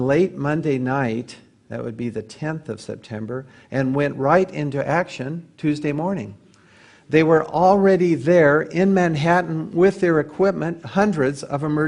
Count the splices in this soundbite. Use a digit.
0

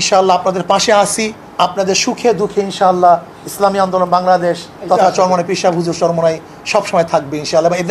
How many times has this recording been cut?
2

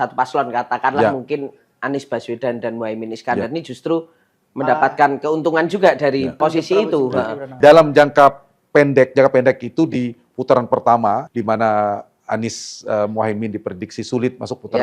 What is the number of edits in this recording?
3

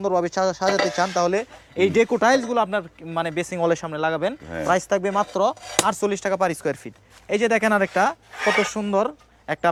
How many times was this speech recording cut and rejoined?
0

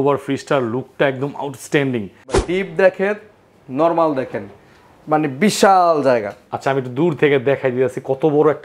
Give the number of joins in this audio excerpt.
1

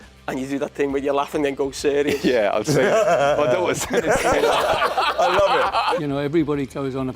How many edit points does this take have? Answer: 1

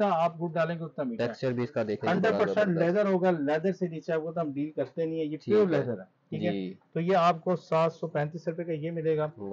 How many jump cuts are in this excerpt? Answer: 0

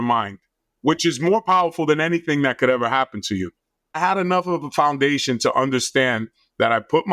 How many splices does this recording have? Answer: 1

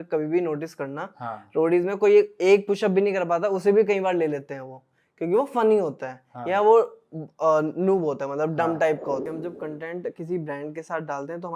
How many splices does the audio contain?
1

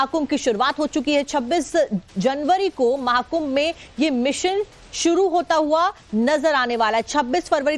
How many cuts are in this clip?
1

